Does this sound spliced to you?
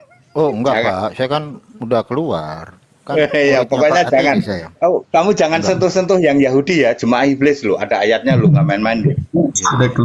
no; 0 cuts

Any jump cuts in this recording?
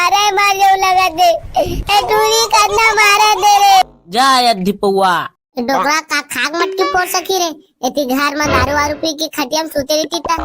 yes; 1 cut; at 3.8 s

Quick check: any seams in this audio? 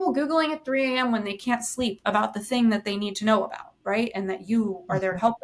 no; 0 cuts

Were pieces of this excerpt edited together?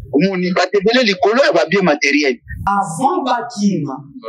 yes; 1 cut; at 2.7 s

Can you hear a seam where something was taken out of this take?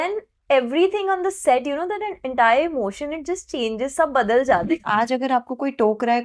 yes; 1 cut; at 4.8 s

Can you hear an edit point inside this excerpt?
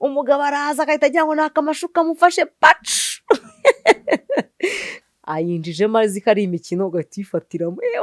yes; 1 cut; at 4.9 s

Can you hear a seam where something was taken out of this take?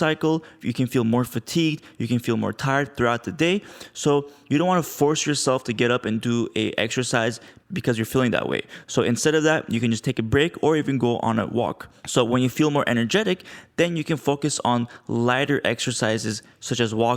no; 0 cuts

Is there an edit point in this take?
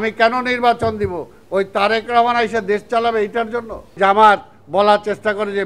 yes; 1 cut; at 4.0 s

